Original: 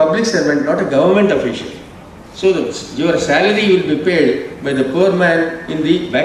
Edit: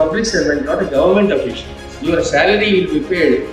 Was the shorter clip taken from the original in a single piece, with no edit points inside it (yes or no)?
no